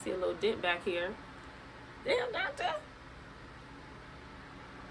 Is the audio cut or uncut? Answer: uncut